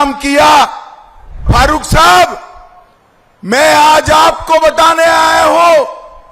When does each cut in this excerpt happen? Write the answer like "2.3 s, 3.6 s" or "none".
1.4 s